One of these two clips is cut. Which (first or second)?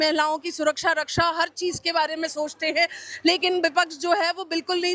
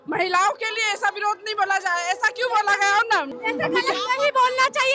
second